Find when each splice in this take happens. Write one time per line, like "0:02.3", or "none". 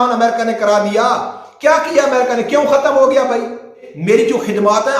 0:03.8